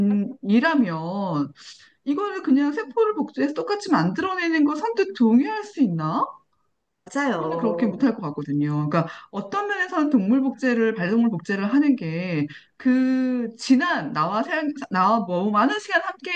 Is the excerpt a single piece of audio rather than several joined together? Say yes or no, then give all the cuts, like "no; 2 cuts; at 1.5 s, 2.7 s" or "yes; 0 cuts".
yes; 0 cuts